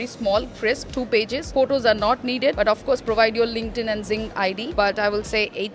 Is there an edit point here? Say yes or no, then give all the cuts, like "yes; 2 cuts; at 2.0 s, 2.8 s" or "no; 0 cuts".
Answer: yes; 2 cuts; at 2.6 s, 4.7 s